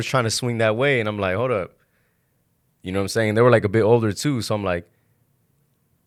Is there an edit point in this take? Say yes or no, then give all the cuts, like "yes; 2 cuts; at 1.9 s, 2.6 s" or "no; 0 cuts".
no; 0 cuts